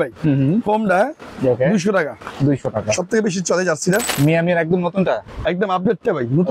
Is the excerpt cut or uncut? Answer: cut